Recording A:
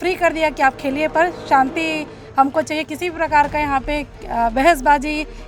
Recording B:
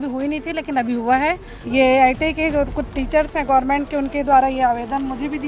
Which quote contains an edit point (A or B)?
B